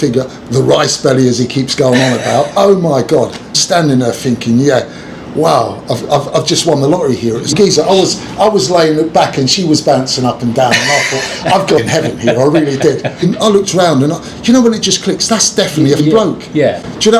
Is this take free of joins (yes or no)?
no